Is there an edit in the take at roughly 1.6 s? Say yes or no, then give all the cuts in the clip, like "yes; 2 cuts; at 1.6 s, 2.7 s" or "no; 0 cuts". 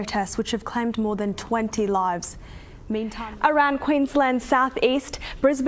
no; 1 cut; at 3.1 s